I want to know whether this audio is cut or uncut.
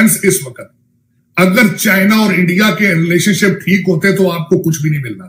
uncut